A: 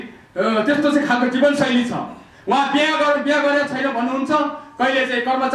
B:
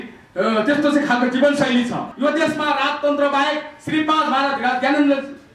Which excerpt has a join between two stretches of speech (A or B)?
B